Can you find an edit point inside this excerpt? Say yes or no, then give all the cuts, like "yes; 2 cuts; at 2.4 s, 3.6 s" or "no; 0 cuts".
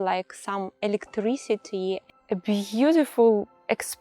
yes; 1 cut; at 2.1 s